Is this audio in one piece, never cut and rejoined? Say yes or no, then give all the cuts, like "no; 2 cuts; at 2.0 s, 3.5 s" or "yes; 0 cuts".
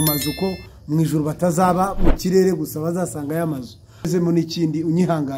no; 1 cut; at 4.1 s